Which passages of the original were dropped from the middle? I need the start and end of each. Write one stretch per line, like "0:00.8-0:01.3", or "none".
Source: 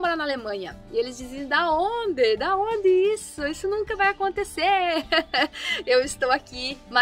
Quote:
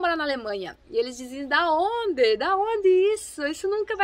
none